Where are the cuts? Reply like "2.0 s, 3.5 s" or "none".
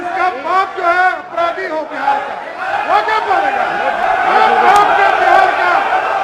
4.0 s